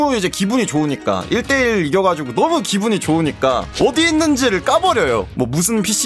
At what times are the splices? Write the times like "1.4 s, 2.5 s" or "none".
none